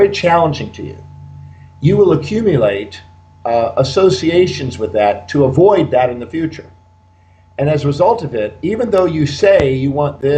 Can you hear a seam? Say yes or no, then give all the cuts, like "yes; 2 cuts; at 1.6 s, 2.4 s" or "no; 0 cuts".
no; 0 cuts